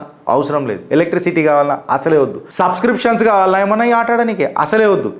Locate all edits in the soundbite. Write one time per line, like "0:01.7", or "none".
0:02.4